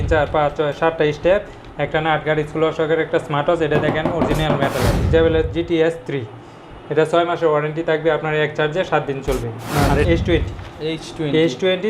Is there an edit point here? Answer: yes; 2 cuts; at 5.1 s, 10.1 s

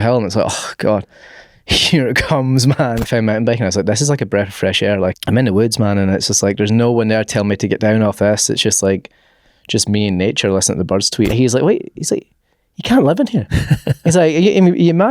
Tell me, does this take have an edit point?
yes; 3 cuts; at 3.0 s, 5.1 s, 11.3 s

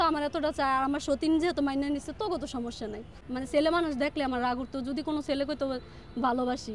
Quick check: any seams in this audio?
yes; 1 cut; at 3.2 s

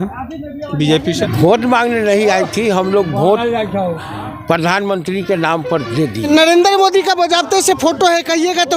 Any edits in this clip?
yes; 2 cuts; at 1.3 s, 6.3 s

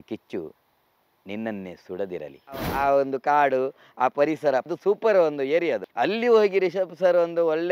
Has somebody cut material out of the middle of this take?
yes; 3 cuts; at 2.7 s, 4.7 s, 5.9 s

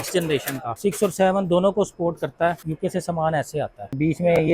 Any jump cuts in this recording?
yes; 1 cut; at 2.6 s

